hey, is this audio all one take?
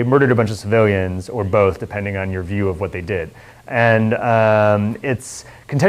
no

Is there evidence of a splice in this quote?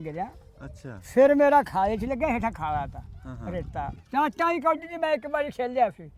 yes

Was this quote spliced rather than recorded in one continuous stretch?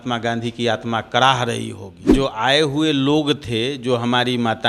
yes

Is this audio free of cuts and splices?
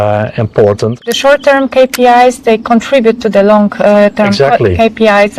no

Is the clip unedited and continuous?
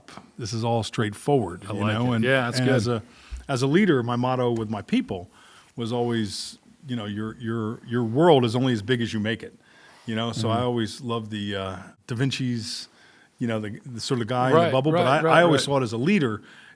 no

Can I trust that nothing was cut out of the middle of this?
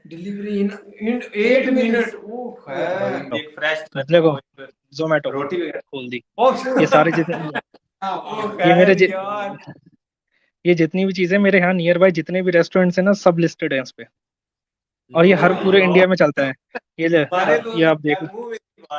no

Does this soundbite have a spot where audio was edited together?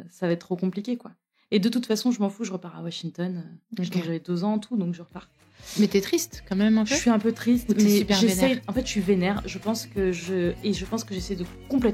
no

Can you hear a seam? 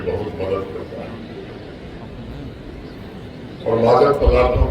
no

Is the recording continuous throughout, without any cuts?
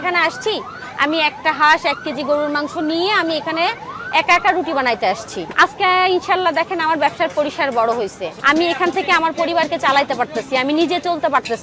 yes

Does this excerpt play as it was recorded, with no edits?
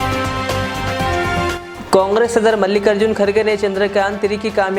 yes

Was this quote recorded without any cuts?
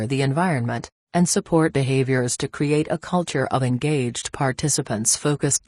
yes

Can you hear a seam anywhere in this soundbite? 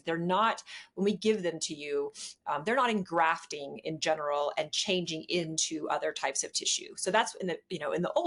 no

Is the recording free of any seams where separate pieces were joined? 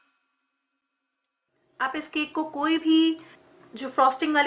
yes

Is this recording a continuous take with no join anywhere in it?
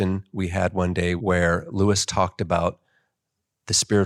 no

